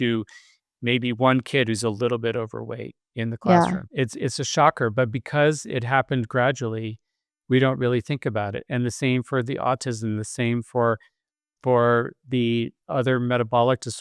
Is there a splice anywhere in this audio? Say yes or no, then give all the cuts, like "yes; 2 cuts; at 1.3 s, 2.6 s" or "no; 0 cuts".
yes; 1 cut; at 3.9 s